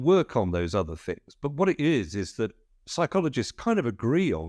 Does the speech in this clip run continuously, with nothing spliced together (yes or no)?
yes